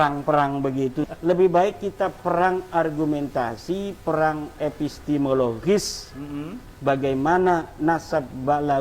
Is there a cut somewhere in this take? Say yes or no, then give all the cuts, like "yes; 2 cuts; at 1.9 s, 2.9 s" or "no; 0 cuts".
yes; 1 cut; at 1.0 s